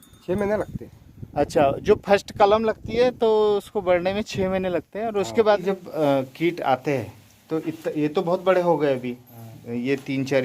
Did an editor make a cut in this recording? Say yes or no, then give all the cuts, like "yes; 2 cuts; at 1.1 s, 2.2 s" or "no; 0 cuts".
yes; 1 cut; at 5.6 s